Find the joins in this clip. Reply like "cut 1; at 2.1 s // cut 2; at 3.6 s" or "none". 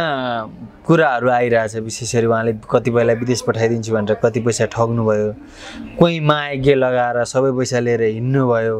none